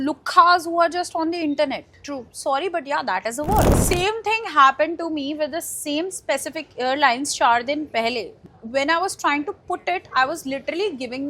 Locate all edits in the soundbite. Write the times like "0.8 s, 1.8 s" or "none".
3.7 s, 8.5 s

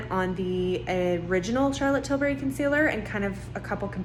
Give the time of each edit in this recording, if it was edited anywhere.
none

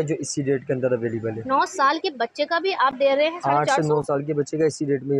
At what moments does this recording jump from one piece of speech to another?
none

